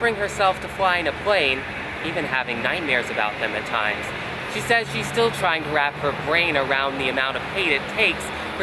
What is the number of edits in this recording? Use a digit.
0